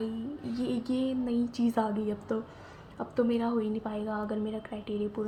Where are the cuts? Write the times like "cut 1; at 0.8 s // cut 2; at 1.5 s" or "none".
none